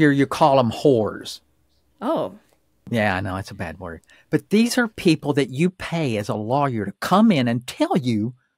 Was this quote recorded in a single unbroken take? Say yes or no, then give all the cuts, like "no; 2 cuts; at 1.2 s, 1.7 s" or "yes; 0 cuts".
no; 1 cut; at 2.8 s